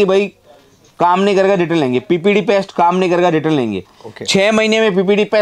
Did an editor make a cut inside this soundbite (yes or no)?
no